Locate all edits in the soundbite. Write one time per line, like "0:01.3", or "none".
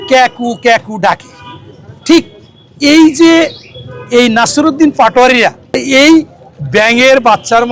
0:05.8